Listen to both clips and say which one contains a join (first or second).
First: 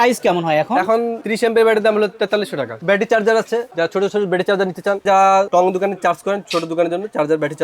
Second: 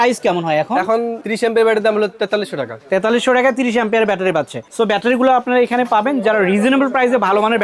first